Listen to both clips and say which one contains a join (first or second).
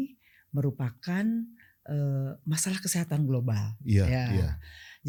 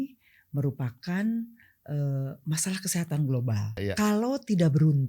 second